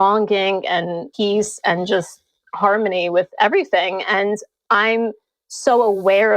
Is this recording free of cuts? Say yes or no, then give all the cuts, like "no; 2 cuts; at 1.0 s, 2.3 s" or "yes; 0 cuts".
no; 1 cut; at 1.1 s